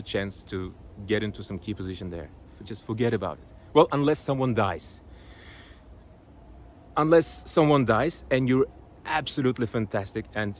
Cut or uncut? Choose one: uncut